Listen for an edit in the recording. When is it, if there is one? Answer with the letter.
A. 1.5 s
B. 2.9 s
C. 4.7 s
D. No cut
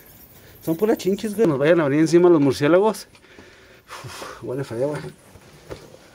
A